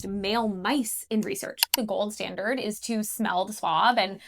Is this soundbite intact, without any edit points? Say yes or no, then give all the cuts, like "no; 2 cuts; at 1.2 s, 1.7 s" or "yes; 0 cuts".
no; 1 cut; at 1.8 s